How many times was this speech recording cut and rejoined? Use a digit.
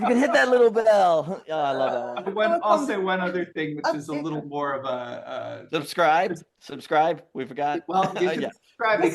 1